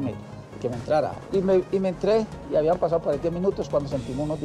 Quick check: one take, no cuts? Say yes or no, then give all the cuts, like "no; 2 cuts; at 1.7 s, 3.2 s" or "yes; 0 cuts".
no; 1 cut; at 1.2 s